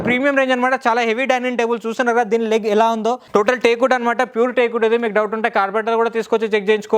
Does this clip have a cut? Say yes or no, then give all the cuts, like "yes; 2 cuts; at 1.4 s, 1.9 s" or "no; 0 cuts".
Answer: yes; 1 cut; at 3.2 s